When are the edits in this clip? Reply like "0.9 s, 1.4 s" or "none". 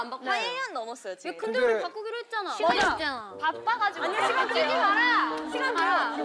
none